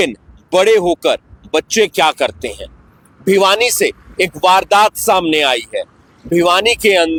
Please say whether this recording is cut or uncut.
uncut